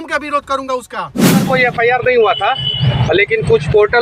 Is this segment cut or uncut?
cut